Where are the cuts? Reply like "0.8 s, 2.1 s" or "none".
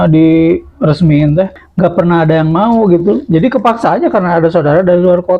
1.6 s